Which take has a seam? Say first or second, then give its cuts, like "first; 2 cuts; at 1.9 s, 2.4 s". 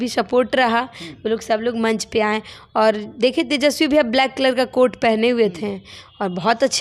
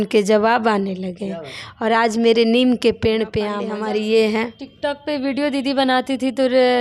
second; 1 cut; at 3.6 s